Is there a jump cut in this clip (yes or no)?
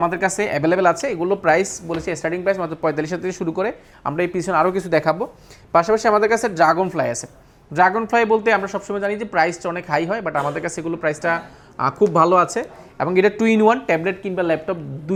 no